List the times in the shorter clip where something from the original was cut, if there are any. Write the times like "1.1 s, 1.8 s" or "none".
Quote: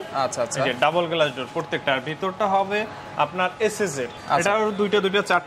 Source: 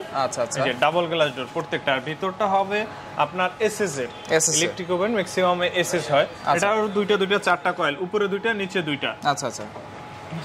4.2 s